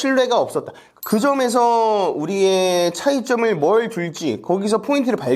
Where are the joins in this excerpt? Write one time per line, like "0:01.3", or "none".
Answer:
0:00.9

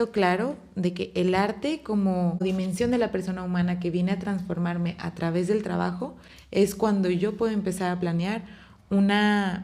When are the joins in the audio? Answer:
0:02.4

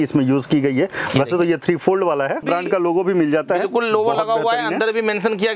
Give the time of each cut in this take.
0:02.4

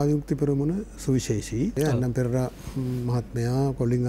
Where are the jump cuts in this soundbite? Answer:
0:01.7

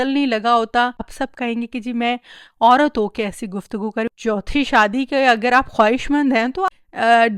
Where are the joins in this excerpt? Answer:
0:01.2
0:04.1
0:06.7

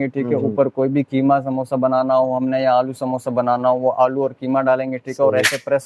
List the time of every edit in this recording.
none

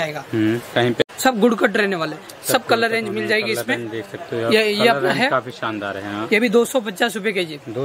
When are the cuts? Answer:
0:01.0

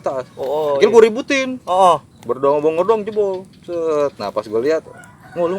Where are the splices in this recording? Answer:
0:02.1

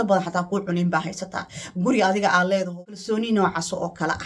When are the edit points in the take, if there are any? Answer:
0:02.9

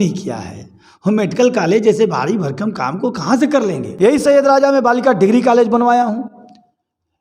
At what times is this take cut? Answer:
0:03.8

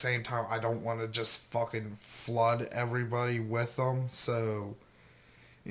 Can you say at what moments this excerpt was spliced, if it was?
none

